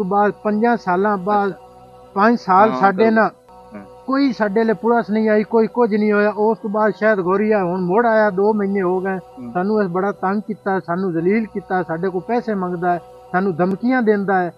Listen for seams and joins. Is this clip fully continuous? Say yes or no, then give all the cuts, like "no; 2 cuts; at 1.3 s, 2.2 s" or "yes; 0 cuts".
yes; 0 cuts